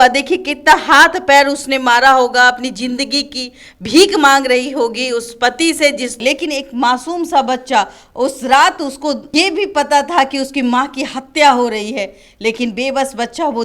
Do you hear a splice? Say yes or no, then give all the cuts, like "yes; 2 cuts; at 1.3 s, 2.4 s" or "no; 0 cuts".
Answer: yes; 2 cuts; at 6.2 s, 9.2 s